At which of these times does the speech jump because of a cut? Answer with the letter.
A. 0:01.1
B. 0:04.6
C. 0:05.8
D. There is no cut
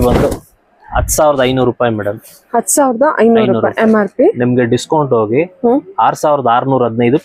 D